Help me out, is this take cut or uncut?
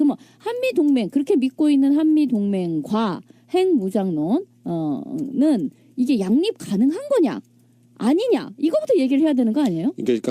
uncut